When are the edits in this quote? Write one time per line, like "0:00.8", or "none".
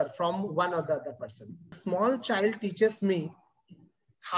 0:01.8